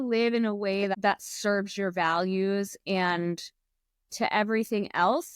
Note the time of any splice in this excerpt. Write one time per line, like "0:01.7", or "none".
0:00.9

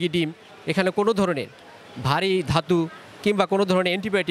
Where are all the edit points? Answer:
none

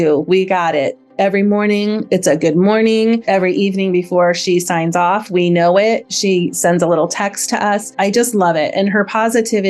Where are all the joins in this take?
0:03.2
0:07.9

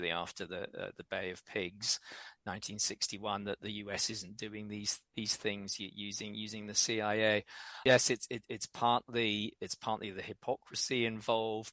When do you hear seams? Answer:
none

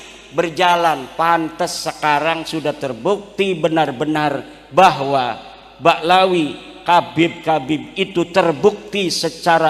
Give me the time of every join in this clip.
none

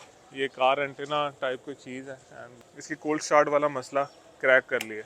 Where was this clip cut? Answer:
0:02.5

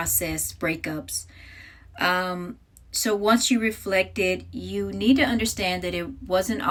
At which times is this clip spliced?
none

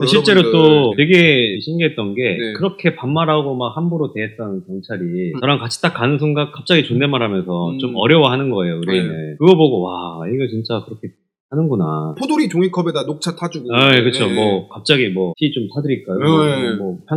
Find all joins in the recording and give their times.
none

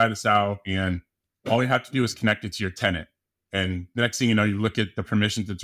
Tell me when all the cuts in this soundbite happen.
none

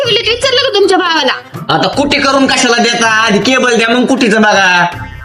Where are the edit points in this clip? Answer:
none

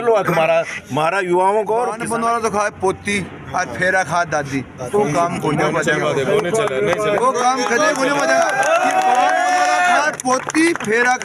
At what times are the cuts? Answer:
0:02.0

